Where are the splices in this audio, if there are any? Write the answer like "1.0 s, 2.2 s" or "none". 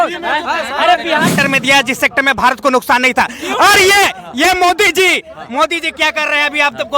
1.3 s